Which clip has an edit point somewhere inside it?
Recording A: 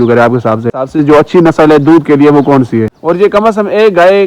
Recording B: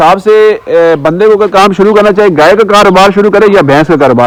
A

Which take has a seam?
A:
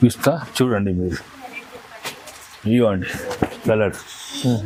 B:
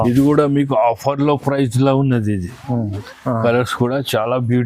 B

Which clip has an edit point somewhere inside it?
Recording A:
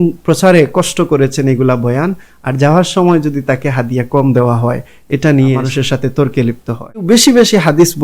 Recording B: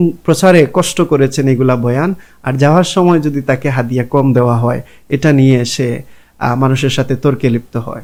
A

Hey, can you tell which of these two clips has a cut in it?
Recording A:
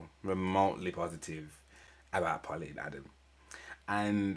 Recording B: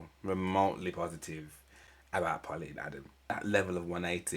B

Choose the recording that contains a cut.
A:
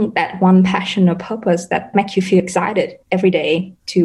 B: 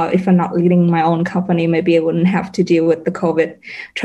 A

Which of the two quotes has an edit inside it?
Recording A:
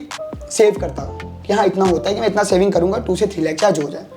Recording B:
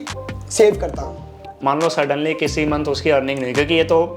B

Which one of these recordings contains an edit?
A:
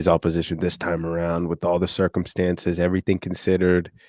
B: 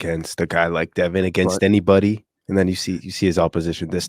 B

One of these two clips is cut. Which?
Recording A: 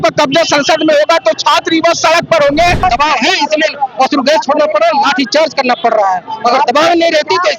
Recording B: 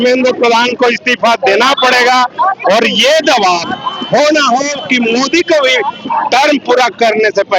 A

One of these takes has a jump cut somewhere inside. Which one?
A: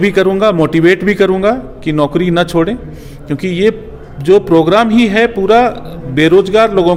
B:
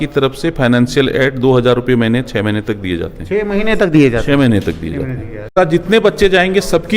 B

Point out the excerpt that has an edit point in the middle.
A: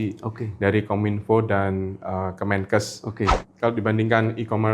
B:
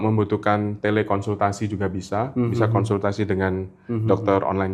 A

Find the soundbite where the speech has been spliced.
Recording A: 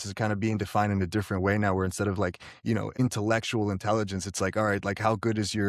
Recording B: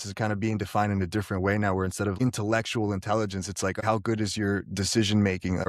B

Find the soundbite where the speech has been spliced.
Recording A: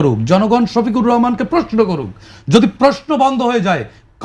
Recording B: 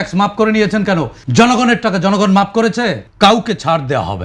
B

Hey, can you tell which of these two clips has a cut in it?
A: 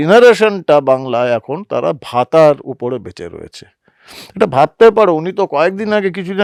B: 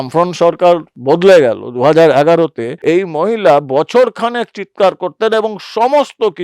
B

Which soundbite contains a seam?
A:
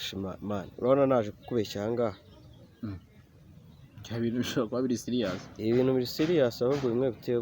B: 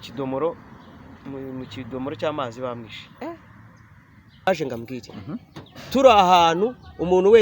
B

